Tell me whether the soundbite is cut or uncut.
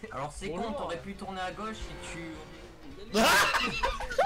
uncut